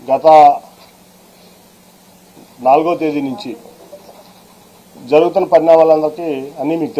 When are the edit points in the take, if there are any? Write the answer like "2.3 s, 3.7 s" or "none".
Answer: 2.8 s

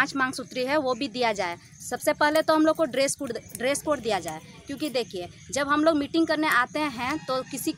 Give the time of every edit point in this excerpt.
none

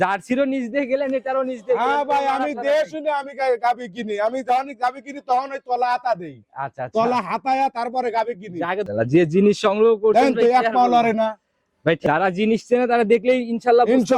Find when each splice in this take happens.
8.9 s, 12.0 s

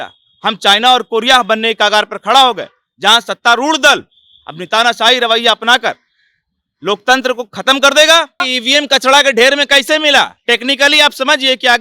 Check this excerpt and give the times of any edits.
8.5 s

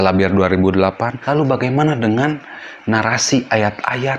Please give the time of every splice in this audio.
1.1 s

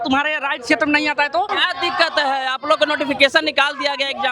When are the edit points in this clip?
1.5 s

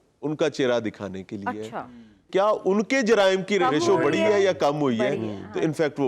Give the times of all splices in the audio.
2.3 s, 3.6 s

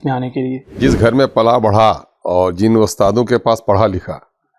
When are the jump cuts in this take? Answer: 0.8 s, 2.1 s

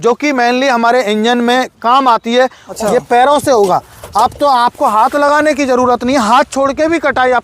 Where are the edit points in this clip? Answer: 2.6 s

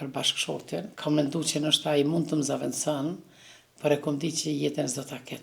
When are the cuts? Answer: 0.9 s

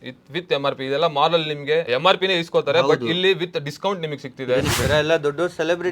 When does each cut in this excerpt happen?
1.9 s, 4.7 s

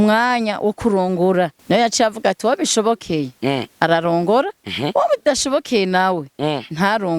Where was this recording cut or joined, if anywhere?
1.6 s

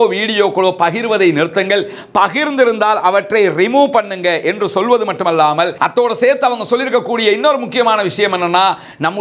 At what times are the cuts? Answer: none

